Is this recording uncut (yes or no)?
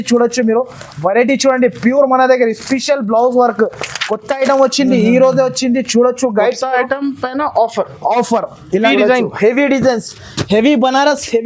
no